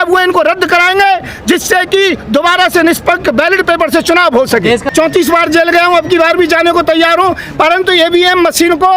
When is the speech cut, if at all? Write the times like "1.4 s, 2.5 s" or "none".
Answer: 4.9 s